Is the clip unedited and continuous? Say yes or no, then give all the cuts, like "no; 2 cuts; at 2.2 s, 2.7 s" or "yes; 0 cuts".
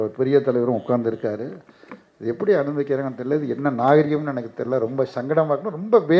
yes; 0 cuts